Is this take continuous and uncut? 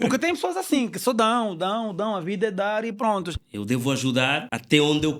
no; 1 cut; at 3.4 s

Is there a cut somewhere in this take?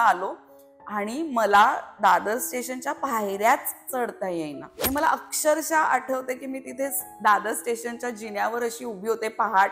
yes; 1 cut; at 4.7 s

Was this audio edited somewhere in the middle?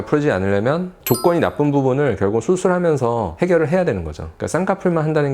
yes; 1 cut; at 0.9 s

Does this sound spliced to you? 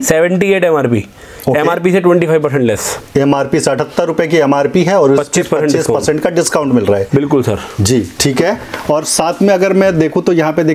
no; 0 cuts

